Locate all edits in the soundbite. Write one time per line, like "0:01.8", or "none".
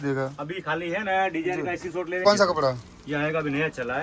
0:02.2

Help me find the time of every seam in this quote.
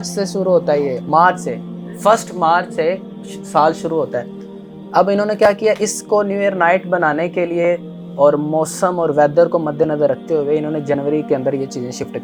none

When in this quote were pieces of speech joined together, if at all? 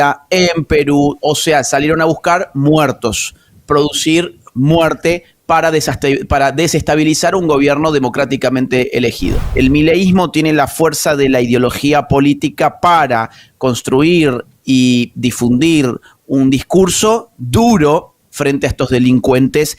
0:09.4

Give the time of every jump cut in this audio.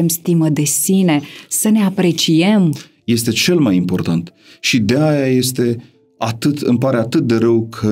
none

